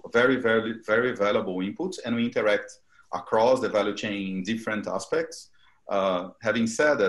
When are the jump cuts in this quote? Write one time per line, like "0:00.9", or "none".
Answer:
none